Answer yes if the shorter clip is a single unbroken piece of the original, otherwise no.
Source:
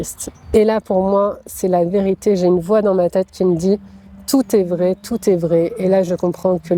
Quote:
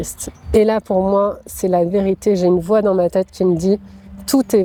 yes